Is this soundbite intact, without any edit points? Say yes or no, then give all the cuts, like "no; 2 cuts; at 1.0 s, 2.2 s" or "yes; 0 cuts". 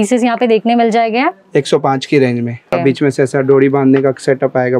no; 1 cut; at 2.8 s